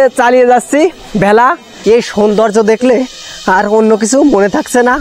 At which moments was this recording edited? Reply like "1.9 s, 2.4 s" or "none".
1.7 s